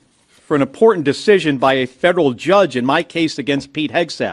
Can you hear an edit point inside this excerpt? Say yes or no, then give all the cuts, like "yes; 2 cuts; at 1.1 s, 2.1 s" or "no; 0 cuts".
no; 0 cuts